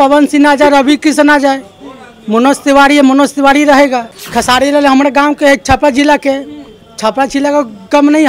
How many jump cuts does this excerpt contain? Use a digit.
1